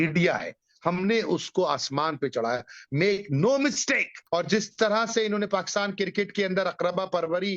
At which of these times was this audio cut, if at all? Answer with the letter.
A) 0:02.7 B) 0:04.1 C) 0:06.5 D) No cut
B